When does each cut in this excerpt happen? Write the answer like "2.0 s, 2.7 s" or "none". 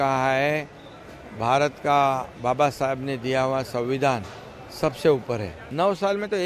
5.6 s